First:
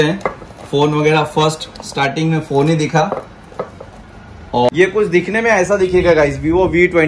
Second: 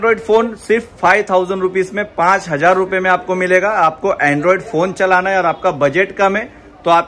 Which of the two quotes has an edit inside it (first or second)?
first